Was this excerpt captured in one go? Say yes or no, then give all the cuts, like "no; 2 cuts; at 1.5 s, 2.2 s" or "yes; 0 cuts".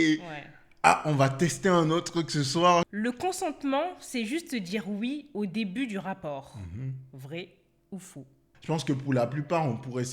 no; 2 cuts; at 2.9 s, 8.5 s